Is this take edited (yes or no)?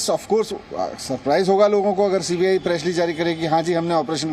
no